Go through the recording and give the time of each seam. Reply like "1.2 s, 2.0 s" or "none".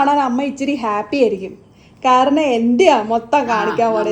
none